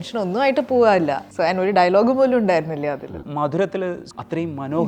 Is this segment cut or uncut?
cut